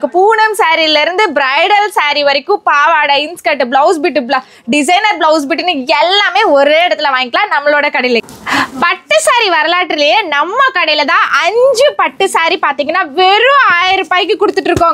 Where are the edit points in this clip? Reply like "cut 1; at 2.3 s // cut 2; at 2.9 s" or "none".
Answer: cut 1; at 8.2 s